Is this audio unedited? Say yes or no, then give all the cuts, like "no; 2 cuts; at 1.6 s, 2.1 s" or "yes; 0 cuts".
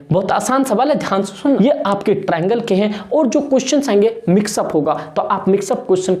no; 1 cut; at 1.4 s